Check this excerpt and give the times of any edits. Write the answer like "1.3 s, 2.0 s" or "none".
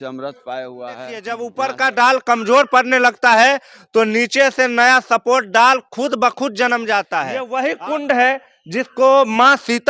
1.3 s, 7.4 s